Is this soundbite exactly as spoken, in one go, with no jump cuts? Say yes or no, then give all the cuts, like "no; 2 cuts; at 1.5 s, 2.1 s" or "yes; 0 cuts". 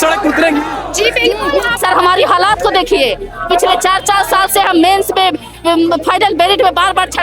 no; 1 cut; at 1.8 s